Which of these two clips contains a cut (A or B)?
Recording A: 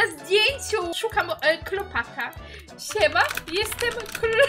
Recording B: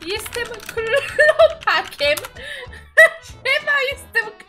A